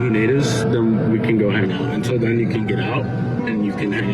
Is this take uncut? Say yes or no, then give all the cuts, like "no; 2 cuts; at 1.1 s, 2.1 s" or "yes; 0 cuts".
yes; 0 cuts